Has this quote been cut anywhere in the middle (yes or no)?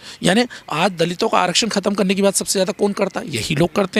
no